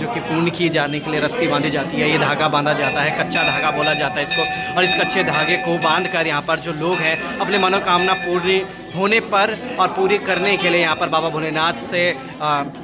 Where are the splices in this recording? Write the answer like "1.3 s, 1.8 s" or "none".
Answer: none